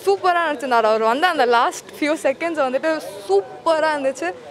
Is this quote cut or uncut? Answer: uncut